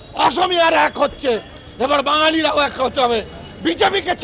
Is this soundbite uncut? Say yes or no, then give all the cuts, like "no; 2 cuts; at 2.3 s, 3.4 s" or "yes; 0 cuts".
yes; 0 cuts